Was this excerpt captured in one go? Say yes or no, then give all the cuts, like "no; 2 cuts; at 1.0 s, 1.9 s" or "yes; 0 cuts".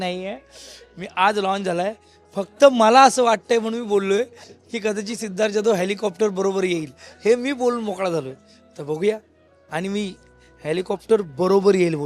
yes; 0 cuts